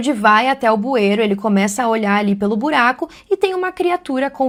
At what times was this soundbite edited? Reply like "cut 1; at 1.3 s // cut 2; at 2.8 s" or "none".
none

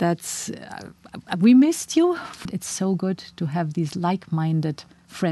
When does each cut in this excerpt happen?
cut 1; at 2.5 s

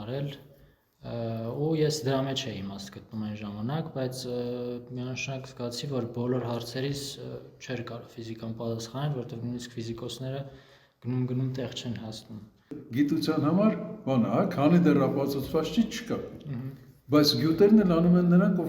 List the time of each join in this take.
cut 1; at 12.8 s

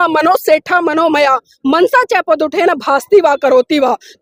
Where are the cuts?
none

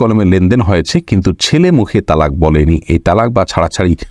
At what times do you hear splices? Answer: none

